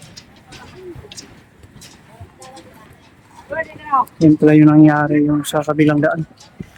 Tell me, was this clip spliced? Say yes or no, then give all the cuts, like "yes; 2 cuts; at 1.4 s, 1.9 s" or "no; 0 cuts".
no; 0 cuts